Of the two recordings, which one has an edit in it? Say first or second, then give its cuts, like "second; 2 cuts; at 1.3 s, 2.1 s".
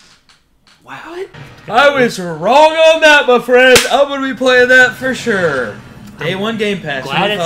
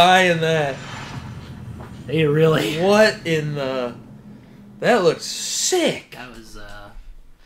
first; 1 cut; at 1.3 s